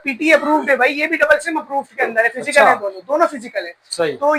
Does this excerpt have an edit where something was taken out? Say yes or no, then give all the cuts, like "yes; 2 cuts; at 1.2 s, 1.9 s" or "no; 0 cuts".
no; 0 cuts